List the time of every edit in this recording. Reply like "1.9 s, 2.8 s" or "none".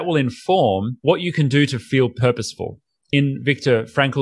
0.9 s